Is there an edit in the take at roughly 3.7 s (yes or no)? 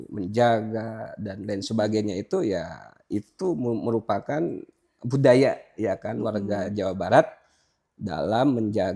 no